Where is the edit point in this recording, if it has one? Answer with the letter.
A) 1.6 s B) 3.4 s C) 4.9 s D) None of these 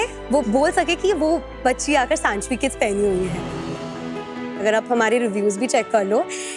D